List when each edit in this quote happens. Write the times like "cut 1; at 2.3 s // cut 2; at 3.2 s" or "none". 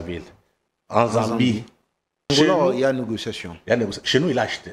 cut 1; at 2.3 s